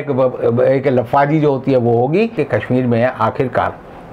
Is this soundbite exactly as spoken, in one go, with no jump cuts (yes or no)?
no